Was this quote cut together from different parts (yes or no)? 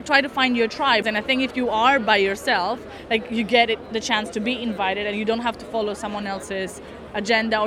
yes